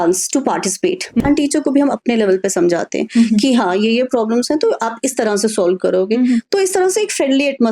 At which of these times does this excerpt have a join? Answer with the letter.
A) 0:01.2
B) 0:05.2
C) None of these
A